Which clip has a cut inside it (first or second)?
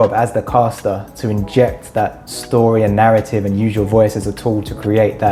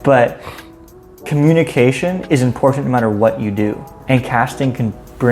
second